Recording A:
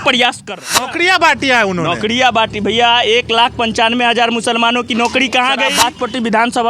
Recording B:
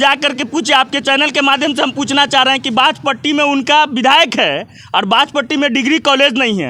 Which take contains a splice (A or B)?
A